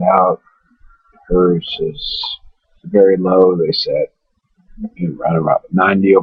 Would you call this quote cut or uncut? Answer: cut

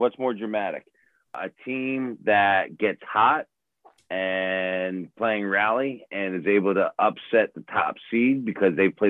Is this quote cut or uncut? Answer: cut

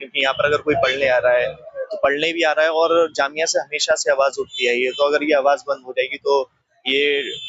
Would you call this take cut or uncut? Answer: uncut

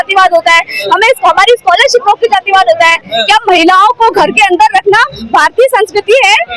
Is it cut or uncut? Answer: cut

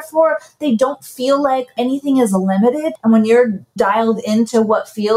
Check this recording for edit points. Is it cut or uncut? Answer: cut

